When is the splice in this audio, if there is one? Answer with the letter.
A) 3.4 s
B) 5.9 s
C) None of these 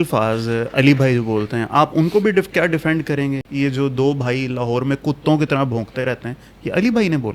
A